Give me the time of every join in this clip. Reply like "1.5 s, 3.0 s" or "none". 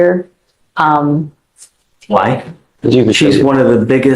2.6 s